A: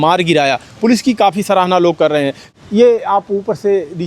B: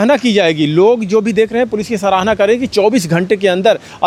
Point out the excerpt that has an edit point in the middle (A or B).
A